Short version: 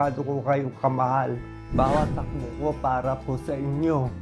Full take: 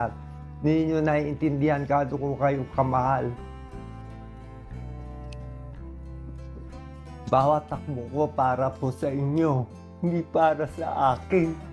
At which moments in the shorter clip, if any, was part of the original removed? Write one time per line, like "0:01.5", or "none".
0:01.6